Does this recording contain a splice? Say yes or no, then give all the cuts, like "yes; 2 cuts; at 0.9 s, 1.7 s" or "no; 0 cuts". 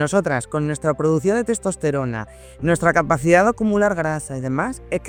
no; 0 cuts